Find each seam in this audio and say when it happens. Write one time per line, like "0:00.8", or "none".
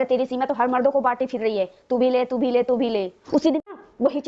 0:03.2